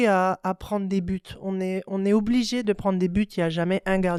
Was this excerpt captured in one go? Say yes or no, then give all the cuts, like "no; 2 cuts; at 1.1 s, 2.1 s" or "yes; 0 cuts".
yes; 0 cuts